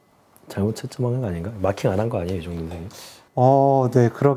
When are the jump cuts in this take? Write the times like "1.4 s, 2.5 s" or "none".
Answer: none